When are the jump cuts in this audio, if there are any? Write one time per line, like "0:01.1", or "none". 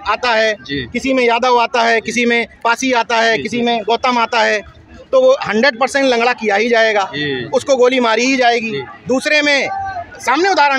none